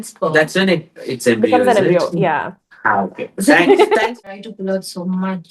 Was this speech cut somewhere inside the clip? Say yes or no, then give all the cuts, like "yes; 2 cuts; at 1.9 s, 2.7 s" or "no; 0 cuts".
yes; 1 cut; at 4.2 s